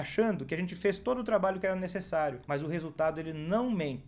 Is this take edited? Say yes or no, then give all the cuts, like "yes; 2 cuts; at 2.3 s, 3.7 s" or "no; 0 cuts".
yes; 1 cut; at 2.4 s